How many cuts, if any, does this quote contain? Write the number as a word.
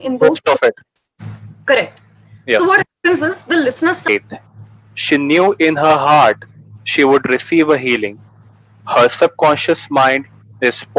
one